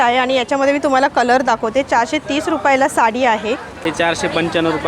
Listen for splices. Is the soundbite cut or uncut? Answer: cut